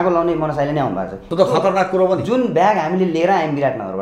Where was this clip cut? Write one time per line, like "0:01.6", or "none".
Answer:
0:01.2